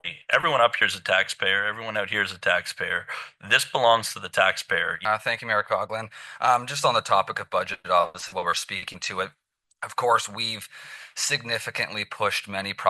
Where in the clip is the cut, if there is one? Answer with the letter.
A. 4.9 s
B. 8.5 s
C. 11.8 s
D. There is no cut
A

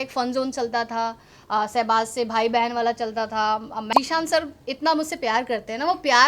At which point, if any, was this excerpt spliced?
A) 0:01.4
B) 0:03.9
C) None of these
B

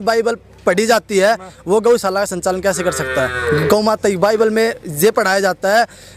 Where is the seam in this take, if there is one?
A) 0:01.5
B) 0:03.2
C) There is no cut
C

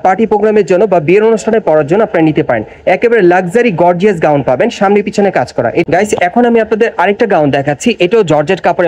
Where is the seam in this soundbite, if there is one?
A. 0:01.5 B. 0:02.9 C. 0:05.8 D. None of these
C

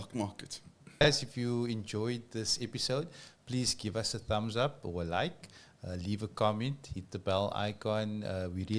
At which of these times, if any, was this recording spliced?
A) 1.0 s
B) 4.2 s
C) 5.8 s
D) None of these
A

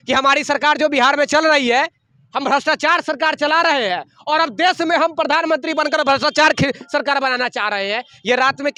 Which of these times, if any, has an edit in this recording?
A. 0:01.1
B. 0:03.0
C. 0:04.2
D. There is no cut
D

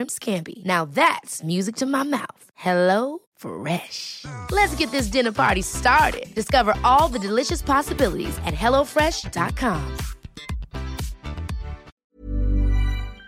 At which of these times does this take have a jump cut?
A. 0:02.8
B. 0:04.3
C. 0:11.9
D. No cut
C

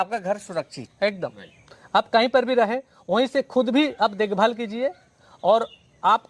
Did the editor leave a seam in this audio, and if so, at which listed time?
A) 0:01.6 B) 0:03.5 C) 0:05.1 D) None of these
D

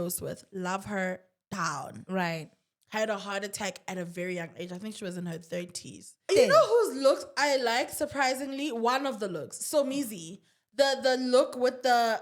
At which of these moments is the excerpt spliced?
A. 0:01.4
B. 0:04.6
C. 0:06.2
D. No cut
C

